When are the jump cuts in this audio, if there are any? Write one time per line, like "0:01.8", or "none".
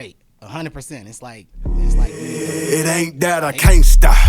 0:01.5